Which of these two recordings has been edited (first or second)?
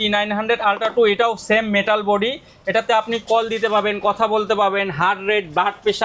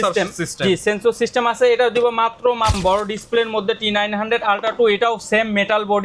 second